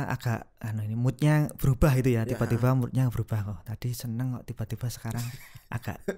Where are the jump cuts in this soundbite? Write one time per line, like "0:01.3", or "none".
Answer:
none